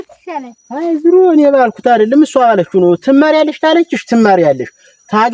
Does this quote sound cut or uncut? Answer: uncut